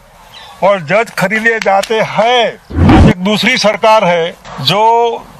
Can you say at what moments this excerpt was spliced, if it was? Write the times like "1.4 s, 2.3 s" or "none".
3.0 s, 4.5 s